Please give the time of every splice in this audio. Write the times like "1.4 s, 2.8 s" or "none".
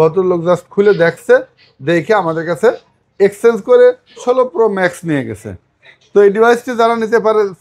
none